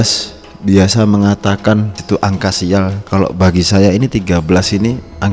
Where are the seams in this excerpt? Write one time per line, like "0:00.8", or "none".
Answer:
0:02.0

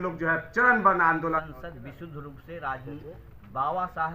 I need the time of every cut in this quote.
0:01.4

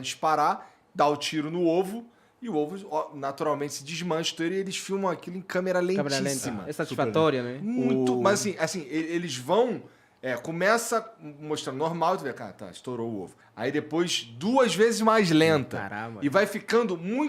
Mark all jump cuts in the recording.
0:13.4

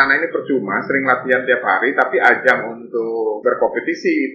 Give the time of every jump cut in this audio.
0:03.4

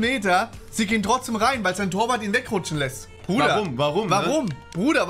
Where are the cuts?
none

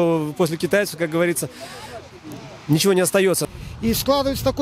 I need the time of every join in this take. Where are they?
0:03.4

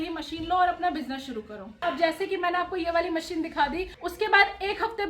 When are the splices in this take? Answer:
0:01.8
0:04.0

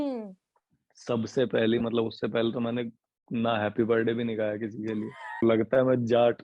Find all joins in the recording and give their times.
0:05.4

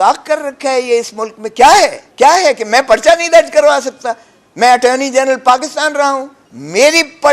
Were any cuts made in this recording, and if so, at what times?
0:02.0
0:06.4

